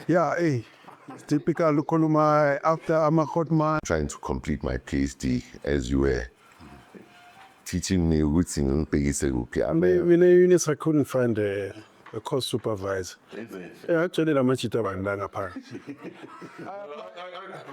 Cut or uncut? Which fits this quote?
cut